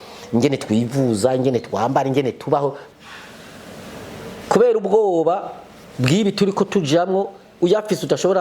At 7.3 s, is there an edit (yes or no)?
no